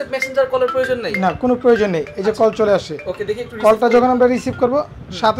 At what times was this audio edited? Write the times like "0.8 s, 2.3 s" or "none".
none